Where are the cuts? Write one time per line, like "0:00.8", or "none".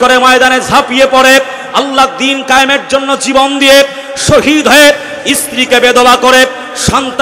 none